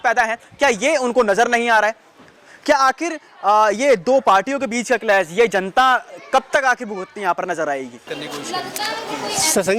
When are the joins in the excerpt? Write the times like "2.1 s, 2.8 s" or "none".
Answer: 8.1 s